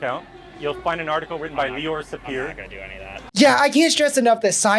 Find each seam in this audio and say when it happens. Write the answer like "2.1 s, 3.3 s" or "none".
3.3 s